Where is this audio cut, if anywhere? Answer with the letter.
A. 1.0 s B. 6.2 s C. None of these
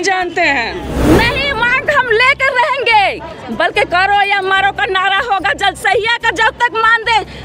A